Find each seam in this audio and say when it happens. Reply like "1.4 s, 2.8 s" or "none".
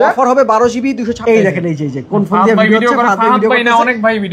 1.2 s

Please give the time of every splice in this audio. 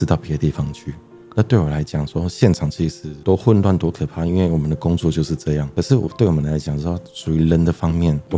none

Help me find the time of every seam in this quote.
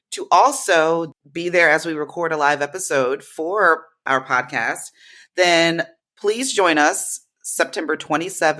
1.2 s

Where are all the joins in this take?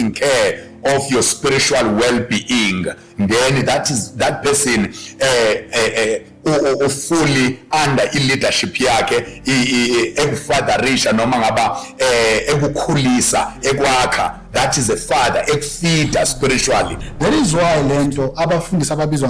17.0 s

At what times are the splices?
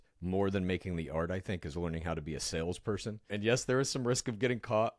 3.3 s

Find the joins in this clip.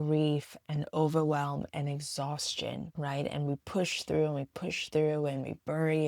2.9 s

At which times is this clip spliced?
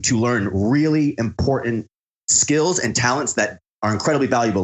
3.6 s

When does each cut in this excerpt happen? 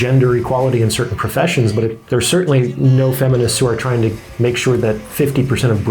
2.0 s

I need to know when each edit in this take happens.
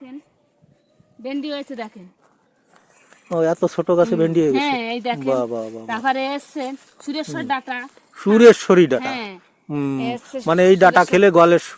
none

